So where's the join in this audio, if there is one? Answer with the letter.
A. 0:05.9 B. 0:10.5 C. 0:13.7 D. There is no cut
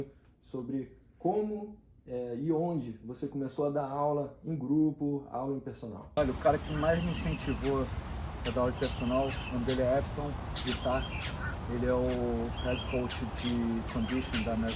A